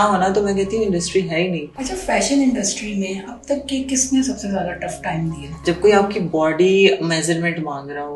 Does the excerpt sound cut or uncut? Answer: cut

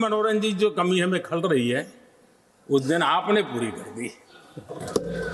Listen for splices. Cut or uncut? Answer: uncut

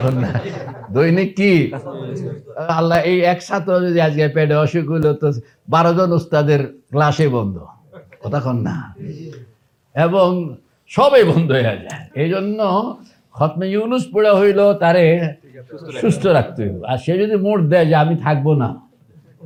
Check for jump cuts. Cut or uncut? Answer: uncut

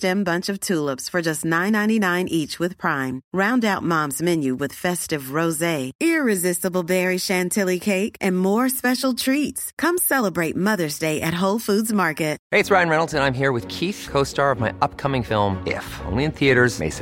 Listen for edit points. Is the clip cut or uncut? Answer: cut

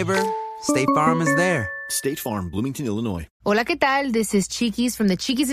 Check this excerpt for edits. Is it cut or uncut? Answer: uncut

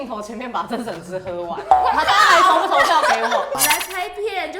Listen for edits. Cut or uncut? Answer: cut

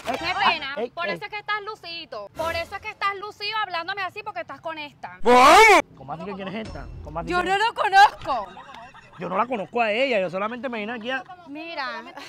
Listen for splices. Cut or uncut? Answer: uncut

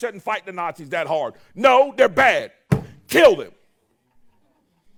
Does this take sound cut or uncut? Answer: uncut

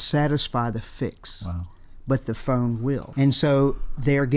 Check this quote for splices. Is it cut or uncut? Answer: cut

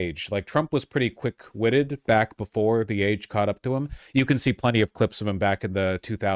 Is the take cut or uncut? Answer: uncut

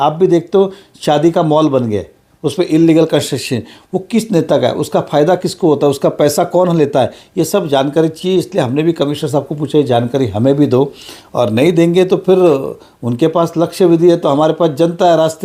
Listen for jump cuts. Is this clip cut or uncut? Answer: uncut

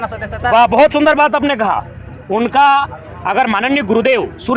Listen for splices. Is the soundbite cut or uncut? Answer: uncut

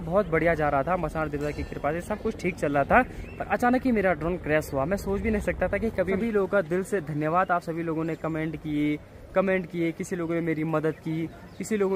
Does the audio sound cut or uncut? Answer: cut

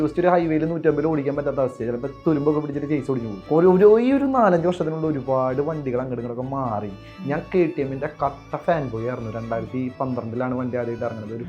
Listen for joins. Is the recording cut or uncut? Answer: cut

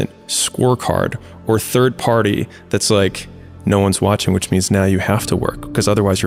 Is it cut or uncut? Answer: uncut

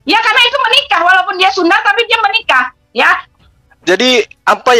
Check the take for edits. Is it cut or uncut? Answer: cut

